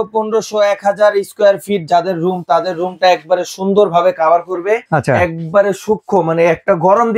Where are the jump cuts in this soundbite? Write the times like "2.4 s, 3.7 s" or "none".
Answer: none